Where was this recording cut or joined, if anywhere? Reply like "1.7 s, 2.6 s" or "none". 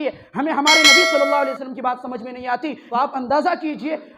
2.8 s